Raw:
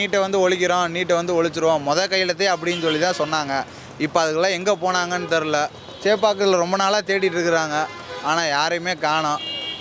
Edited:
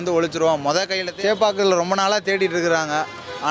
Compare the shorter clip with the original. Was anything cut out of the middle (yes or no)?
yes